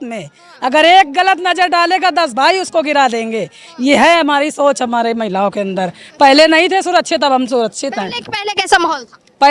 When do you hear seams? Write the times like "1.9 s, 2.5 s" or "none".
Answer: none